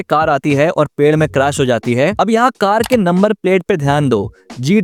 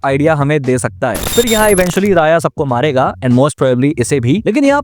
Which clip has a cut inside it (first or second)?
second